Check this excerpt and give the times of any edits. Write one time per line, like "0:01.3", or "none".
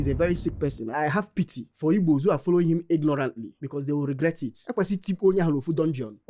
none

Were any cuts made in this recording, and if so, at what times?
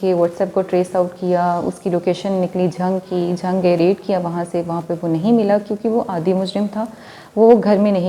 none

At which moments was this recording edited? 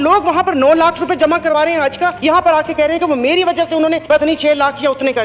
0:02.2
0:04.0

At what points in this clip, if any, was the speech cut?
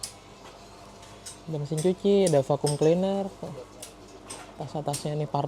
none

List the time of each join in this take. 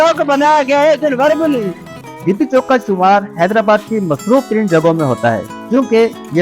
0:01.8

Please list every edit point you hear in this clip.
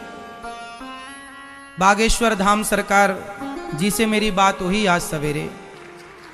none

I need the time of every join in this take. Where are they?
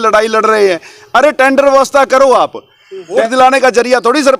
0:03.2

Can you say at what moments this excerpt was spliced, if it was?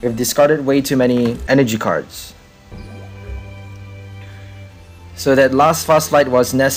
0:01.4
0:02.7

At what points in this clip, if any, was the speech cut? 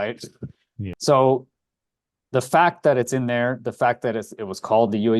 0:01.0

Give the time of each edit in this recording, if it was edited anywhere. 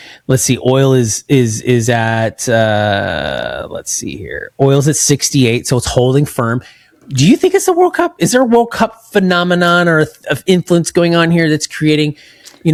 none

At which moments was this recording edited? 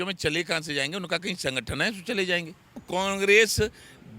0:02.8

